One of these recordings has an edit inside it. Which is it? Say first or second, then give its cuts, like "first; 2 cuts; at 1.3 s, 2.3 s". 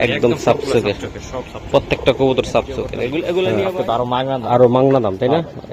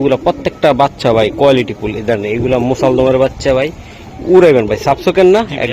first; 1 cut; at 3.4 s